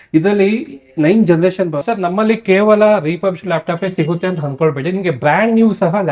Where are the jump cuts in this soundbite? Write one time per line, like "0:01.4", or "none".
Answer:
0:01.8